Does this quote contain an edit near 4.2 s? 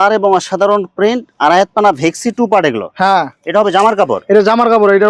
no; 0 cuts

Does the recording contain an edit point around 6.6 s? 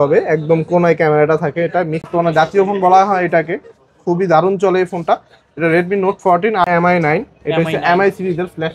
yes; 2 cuts; at 2.1 s, 6.6 s

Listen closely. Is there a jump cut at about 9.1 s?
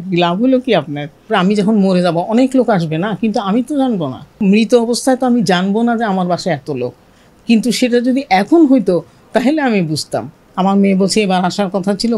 no; 3 cuts; at 1.3 s, 4.4 s, 10.4 s

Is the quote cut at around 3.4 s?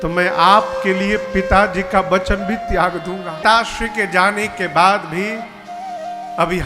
yes; 1 cut; at 3.4 s

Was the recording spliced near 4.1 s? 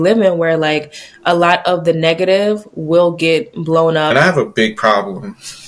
yes; 1 cut; at 4.1 s

